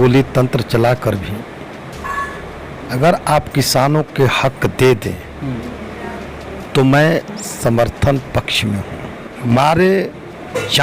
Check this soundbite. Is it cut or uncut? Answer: cut